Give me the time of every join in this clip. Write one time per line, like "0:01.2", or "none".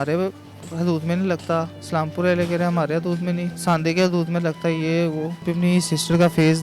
0:03.5
0:05.5

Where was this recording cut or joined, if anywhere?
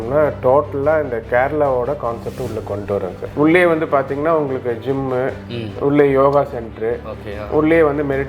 0:03.2

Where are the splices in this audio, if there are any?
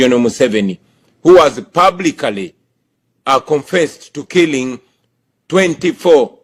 none

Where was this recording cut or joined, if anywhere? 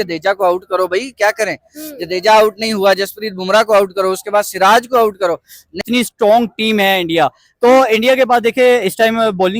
0:05.7

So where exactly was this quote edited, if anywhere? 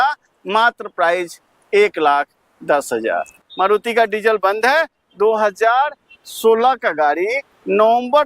0:03.4

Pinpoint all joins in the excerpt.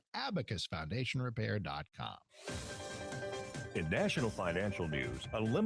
0:02.3

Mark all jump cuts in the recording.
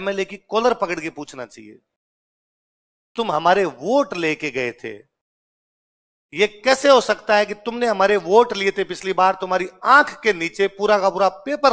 none

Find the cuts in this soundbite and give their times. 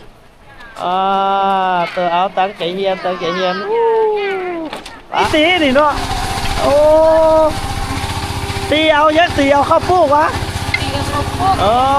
0:05.2

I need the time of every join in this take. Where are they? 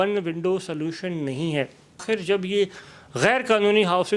0:02.0

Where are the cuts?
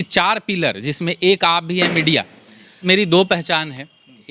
0:02.7

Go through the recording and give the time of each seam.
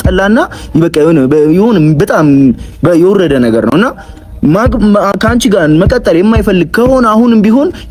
none

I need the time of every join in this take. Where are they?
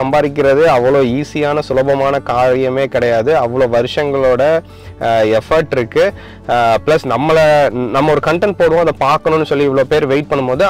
none

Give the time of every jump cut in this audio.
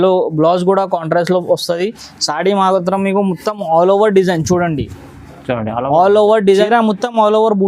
0:06.7

